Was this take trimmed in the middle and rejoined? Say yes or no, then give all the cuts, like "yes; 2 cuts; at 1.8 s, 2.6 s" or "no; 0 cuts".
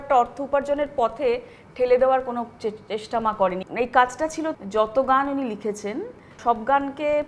yes; 3 cuts; at 3.6 s, 4.6 s, 6.3 s